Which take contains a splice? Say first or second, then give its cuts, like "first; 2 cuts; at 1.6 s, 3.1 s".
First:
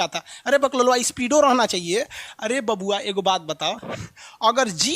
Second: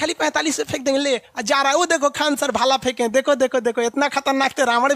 first; 1 cut; at 2.2 s